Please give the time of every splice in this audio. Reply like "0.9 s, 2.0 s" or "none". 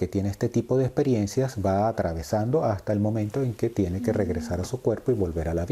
none